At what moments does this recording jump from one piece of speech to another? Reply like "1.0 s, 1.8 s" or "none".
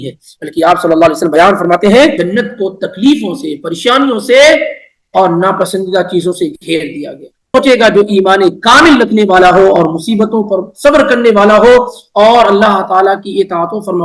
2.2 s, 7.5 s